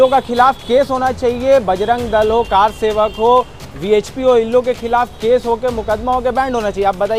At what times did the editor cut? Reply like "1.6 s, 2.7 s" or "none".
none

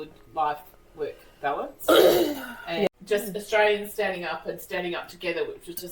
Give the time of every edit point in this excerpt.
2.9 s

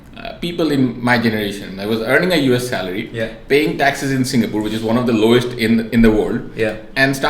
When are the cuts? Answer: none

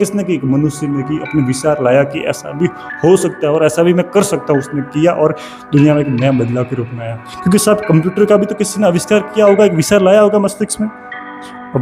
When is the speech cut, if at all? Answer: none

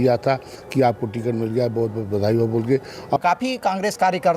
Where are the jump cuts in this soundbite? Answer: 3.2 s

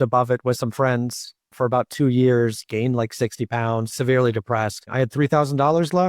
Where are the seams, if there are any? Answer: 3.9 s, 4.8 s

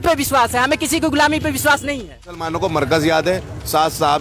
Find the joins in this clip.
2.5 s

